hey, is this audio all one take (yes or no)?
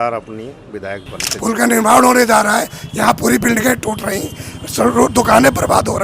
no